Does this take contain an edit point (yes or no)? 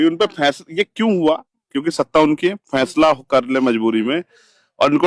no